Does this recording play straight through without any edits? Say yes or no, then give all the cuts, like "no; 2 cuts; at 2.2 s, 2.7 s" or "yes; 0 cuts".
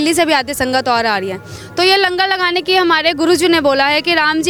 yes; 0 cuts